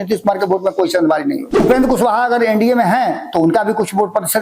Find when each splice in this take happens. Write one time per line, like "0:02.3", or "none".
0:01.6